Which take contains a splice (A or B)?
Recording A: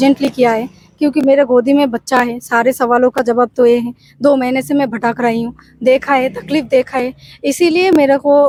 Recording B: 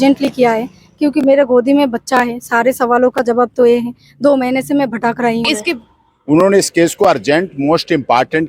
B